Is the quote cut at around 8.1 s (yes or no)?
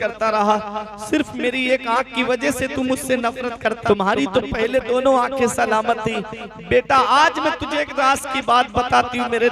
no